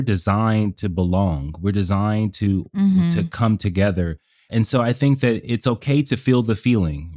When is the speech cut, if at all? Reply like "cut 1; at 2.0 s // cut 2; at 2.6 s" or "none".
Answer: cut 1; at 4.4 s